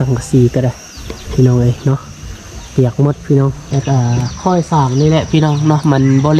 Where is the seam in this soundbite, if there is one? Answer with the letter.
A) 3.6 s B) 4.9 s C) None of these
A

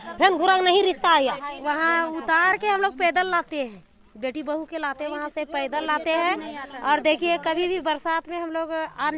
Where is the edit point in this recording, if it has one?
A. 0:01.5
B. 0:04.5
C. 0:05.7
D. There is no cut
A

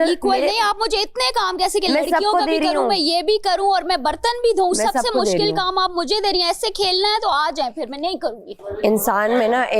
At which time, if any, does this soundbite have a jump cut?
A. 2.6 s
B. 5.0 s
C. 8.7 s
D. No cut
C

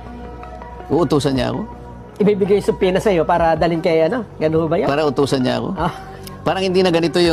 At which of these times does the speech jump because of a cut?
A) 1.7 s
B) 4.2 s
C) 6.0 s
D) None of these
D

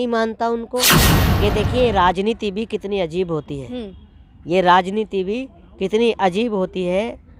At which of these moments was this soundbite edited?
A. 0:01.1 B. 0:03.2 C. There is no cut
A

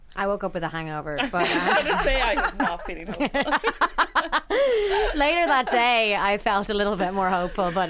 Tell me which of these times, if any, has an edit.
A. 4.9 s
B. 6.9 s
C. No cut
C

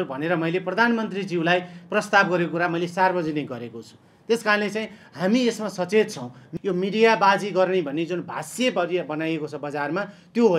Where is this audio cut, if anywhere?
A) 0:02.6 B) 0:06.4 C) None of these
B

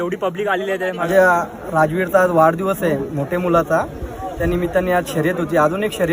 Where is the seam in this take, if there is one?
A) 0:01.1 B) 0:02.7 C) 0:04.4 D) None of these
A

